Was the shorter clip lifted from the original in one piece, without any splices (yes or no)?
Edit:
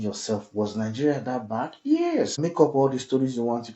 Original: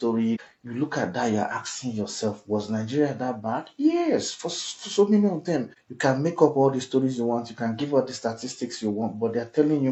no